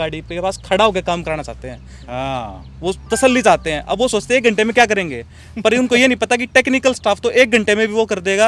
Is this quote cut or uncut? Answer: uncut